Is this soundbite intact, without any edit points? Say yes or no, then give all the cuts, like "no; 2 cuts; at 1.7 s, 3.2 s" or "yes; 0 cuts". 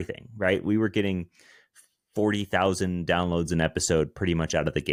yes; 0 cuts